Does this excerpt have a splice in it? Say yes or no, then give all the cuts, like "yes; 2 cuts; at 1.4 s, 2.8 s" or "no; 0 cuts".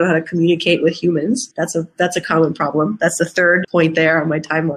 yes; 2 cuts; at 1.5 s, 3.6 s